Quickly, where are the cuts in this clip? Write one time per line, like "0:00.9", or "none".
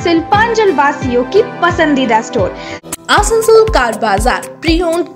0:02.8